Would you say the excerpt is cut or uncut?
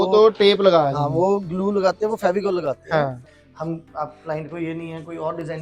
cut